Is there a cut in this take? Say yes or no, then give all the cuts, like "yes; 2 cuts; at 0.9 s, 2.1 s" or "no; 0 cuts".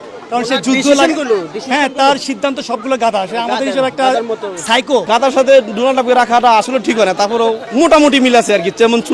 yes; 2 cuts; at 5.1 s, 7.6 s